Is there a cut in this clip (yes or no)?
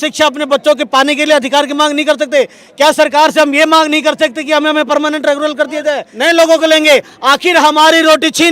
yes